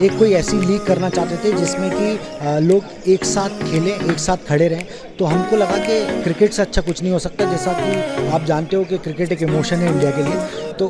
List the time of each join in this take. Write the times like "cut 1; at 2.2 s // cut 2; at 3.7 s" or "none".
none